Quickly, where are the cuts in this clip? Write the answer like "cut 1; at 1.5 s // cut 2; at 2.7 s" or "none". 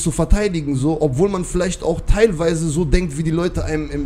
none